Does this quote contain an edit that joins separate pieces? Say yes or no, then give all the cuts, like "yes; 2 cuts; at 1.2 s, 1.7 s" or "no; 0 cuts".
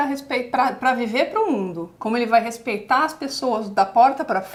no; 0 cuts